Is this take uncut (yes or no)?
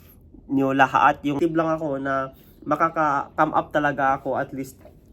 no